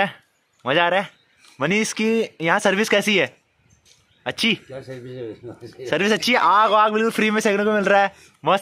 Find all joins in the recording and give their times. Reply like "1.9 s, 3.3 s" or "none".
none